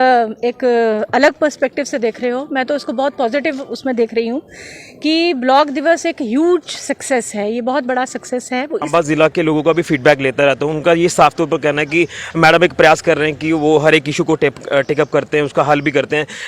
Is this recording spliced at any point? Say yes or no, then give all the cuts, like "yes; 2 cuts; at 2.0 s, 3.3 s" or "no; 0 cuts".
yes; 1 cut; at 8.9 s